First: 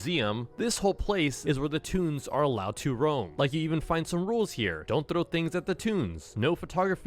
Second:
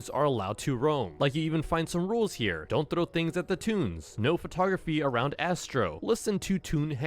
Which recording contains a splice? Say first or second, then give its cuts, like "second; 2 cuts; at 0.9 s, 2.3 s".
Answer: second; 1 cut; at 6.0 s